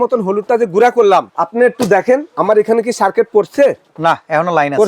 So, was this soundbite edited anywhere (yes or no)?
yes